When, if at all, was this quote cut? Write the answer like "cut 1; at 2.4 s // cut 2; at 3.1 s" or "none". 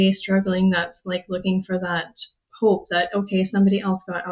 none